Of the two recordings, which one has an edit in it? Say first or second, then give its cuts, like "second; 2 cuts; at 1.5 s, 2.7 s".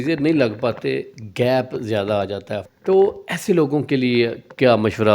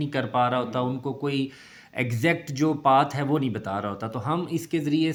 first; 1 cut; at 2.6 s